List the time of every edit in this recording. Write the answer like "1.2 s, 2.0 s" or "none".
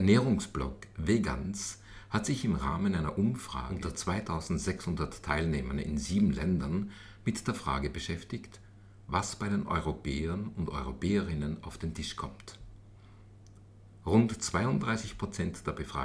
3.6 s